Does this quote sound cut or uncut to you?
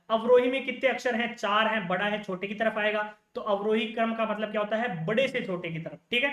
uncut